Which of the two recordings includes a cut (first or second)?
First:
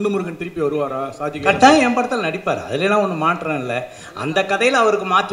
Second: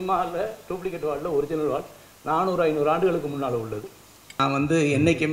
second